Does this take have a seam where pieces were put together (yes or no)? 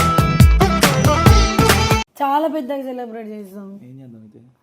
no